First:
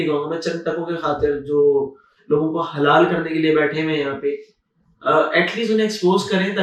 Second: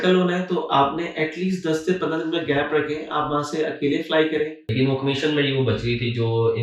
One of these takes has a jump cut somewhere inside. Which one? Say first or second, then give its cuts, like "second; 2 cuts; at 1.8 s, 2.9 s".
second; 1 cut; at 4.6 s